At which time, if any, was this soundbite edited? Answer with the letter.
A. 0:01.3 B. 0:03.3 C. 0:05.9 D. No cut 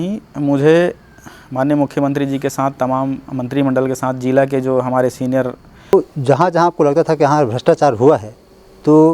C